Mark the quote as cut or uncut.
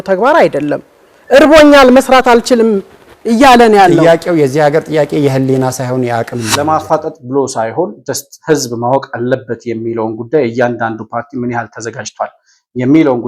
cut